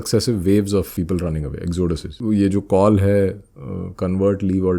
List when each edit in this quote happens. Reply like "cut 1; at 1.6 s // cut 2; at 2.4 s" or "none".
cut 1; at 0.9 s // cut 2; at 2.1 s